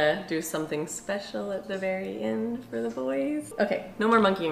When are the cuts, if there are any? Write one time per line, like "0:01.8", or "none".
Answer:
0:03.5